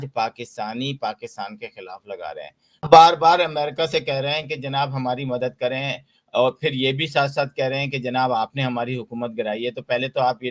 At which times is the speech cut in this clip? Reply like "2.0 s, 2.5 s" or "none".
2.9 s